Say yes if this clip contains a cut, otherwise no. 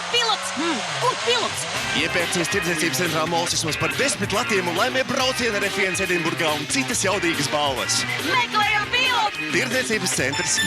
yes